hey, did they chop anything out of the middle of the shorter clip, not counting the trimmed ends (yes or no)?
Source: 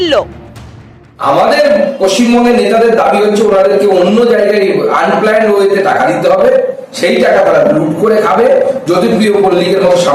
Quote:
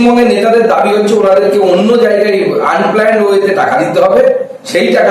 no